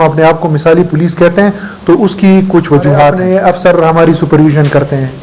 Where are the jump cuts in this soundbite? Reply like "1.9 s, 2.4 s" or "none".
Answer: 3.2 s

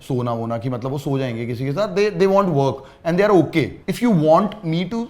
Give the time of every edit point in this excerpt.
3.9 s

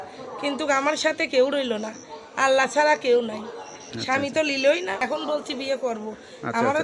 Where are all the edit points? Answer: 5.0 s

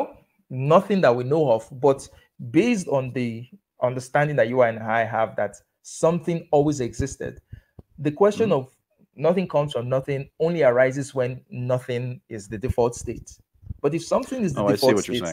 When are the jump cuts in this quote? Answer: none

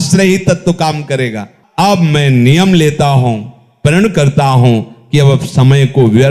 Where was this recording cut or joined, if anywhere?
1.5 s

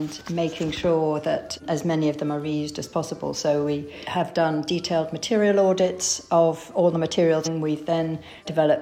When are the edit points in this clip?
4.0 s, 7.5 s

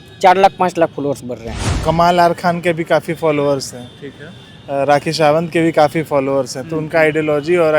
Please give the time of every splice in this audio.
1.6 s

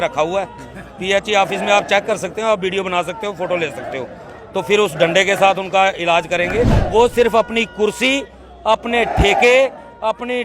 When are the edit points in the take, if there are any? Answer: 6.8 s

